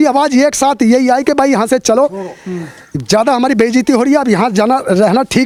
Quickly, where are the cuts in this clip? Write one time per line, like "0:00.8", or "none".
none